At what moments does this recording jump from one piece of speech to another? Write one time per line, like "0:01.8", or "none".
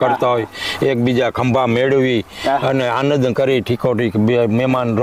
none